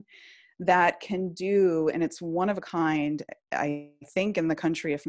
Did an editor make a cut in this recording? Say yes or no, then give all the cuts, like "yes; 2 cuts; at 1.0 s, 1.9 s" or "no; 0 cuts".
no; 0 cuts